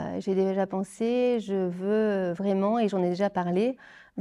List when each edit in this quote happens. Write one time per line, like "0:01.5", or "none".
none